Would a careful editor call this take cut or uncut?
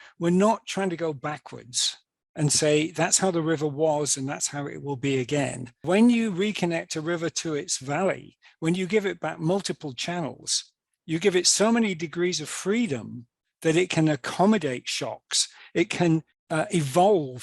cut